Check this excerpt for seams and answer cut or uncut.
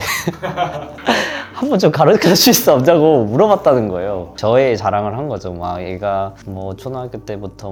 uncut